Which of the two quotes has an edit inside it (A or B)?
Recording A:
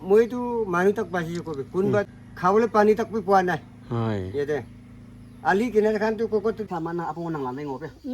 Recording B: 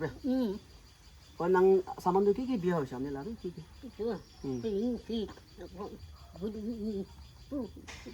A